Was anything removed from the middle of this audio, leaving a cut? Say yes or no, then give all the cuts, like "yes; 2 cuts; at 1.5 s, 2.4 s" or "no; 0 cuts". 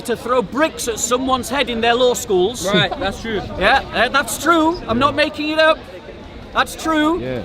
no; 0 cuts